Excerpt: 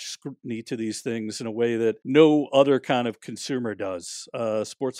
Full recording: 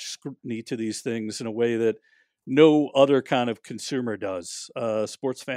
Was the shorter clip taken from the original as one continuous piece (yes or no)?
no